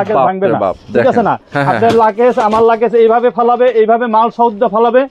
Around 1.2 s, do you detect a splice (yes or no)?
no